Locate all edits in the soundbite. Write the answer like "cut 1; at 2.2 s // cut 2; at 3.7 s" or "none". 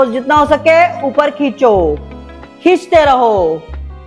none